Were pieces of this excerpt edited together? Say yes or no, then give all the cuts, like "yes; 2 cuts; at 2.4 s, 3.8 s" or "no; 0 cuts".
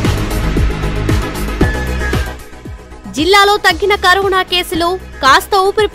no; 0 cuts